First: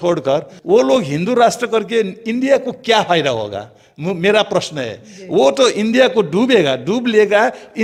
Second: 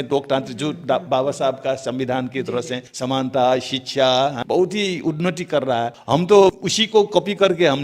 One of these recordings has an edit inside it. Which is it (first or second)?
second